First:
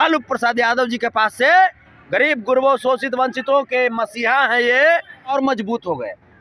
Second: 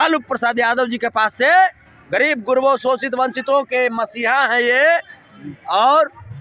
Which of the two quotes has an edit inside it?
first; 1 cut; at 5.3 s

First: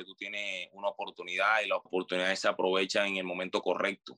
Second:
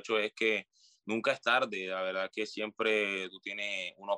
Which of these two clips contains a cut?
first; 1 cut; at 1.9 s

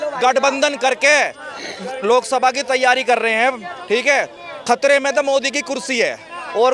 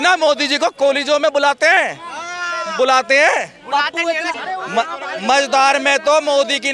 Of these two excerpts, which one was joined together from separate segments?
second; 1 cut; at 4.3 s

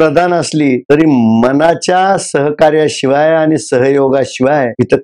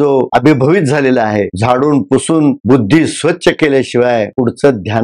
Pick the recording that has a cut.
second; 1 cut; at 1.5 s

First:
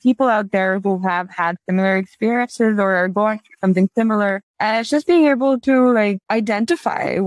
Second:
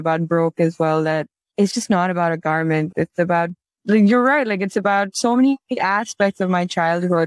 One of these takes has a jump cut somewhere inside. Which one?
first; 2 cuts; at 4.5 s, 6.2 s

